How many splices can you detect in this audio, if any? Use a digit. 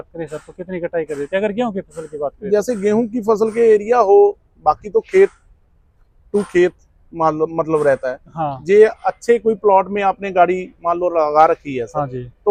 0